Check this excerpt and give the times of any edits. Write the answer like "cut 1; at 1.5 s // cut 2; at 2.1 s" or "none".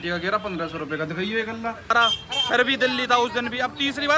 cut 1; at 1.9 s